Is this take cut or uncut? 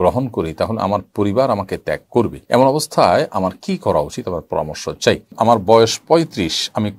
cut